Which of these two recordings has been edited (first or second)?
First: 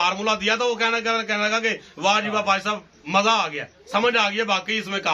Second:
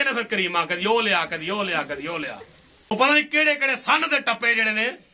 second